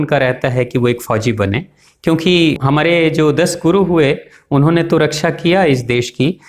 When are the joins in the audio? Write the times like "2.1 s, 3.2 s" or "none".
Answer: 2.6 s